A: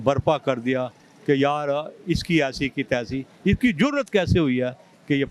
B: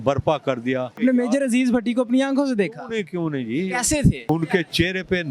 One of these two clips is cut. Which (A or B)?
B